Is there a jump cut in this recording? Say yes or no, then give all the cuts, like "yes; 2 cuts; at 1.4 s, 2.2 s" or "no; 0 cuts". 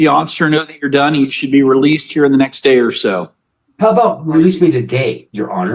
no; 0 cuts